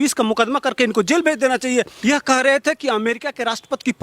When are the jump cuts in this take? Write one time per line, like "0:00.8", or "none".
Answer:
0:01.9

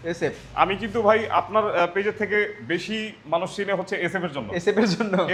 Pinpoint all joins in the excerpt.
none

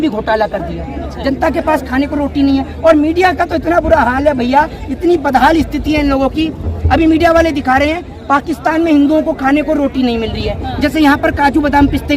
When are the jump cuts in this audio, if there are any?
none

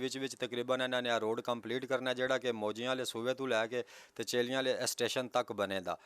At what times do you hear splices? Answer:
none

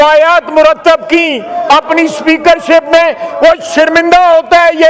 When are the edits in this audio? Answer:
none

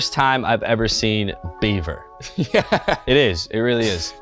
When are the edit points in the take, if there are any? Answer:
none

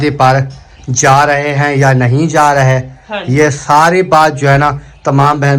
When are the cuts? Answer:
none

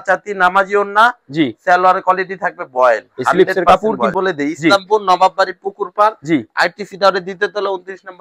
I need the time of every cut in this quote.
0:04.1

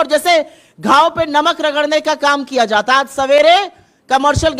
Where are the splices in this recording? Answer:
none

